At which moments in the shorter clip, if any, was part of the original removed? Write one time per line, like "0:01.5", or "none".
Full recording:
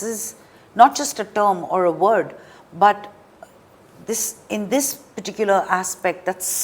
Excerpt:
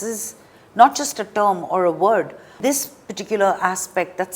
0:02.6